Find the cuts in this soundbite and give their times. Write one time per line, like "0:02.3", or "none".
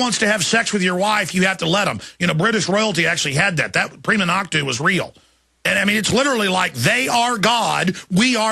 0:04.7